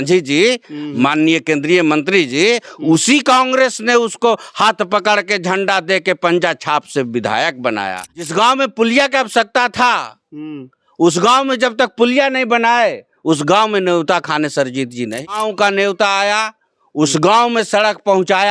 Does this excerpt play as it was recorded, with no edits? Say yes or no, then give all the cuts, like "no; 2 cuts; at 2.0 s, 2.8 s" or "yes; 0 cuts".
no; 2 cuts; at 8.1 s, 15.1 s